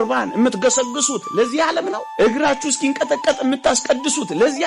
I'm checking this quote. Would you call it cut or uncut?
uncut